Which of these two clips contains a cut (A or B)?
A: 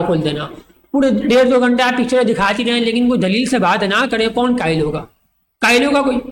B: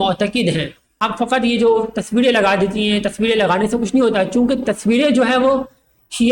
B